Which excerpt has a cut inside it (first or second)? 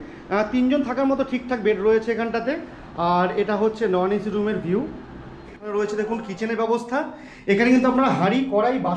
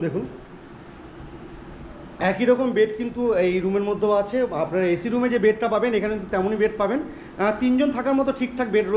first